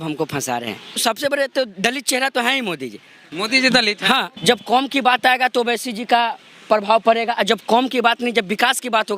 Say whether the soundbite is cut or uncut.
cut